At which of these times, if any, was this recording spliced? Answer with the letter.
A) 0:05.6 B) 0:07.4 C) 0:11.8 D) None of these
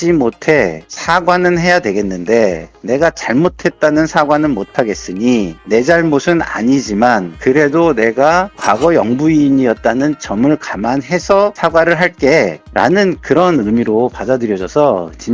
A